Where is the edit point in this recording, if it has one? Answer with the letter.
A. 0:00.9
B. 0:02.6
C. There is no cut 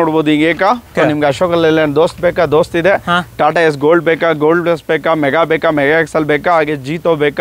A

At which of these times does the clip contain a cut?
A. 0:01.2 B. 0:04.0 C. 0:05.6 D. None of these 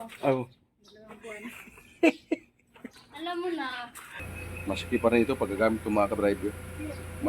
B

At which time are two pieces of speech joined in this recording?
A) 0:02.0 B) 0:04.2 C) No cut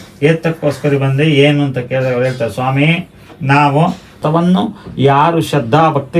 B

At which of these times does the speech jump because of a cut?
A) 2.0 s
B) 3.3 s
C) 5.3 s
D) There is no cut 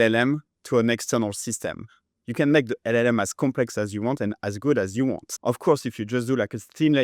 C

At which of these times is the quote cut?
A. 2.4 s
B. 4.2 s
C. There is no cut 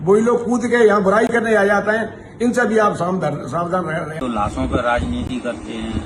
B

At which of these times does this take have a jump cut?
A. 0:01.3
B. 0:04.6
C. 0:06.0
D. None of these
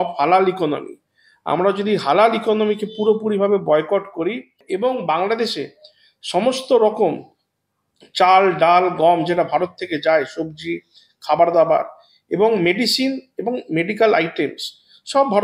B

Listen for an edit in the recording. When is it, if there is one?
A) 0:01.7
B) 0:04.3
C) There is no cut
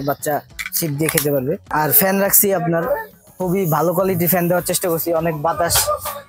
A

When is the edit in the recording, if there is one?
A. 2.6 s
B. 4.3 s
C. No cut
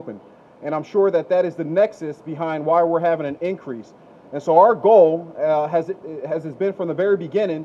C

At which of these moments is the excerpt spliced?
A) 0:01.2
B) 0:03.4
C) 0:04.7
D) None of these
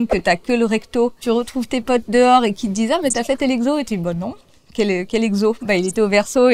A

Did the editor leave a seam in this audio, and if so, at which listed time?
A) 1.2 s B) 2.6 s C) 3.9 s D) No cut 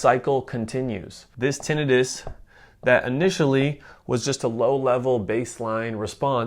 A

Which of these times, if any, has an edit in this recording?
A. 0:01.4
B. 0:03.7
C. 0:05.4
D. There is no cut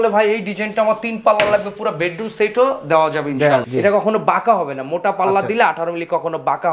B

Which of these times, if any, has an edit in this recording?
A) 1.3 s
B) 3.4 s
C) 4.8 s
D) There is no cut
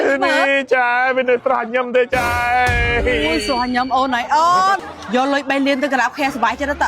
C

